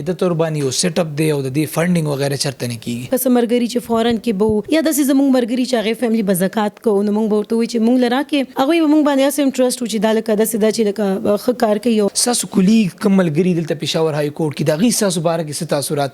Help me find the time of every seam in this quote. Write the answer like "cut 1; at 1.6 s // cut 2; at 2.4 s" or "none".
cut 1; at 3.1 s // cut 2; at 4.6 s // cut 3; at 8.5 s // cut 4; at 12.2 s